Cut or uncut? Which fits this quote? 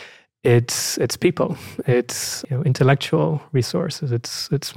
cut